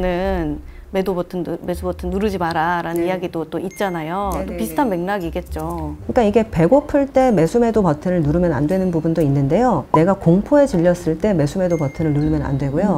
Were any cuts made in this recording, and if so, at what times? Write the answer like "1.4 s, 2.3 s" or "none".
none

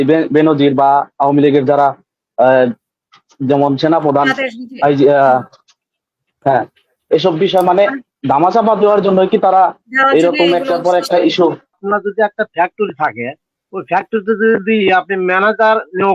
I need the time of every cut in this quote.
11.8 s

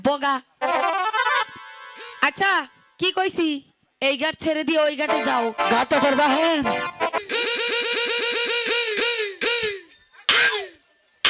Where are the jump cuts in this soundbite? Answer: 7.2 s

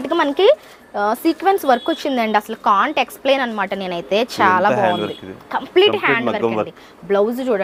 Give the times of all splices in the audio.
none

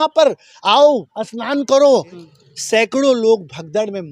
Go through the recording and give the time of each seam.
2.2 s

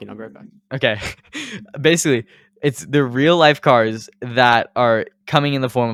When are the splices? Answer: none

